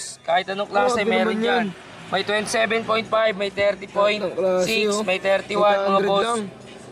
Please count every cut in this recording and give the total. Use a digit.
0